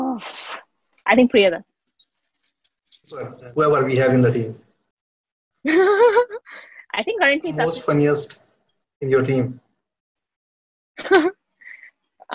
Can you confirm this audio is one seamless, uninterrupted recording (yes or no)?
no